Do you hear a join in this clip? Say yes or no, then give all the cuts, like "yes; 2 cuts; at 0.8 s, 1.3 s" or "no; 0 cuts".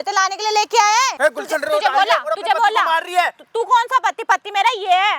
yes; 1 cut; at 1.1 s